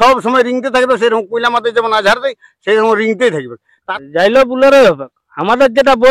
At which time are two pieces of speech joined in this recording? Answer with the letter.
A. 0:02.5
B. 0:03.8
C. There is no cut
B